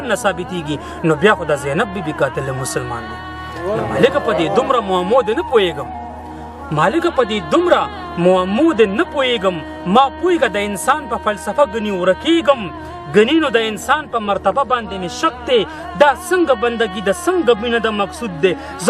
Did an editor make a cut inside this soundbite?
no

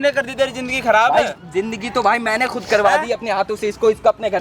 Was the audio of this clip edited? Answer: no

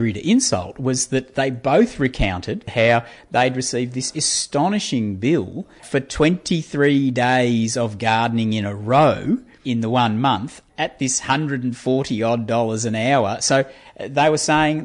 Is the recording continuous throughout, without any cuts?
no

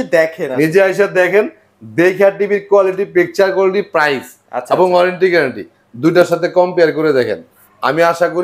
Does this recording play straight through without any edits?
yes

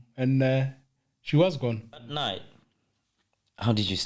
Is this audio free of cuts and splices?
no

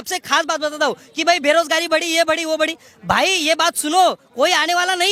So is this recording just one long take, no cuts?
yes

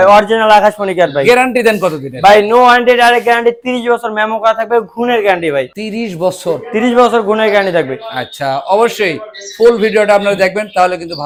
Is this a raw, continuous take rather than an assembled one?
yes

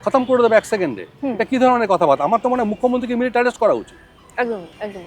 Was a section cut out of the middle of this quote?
no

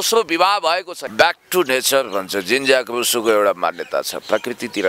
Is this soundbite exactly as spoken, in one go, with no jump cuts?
no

